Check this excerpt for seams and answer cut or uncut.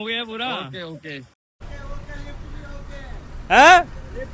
cut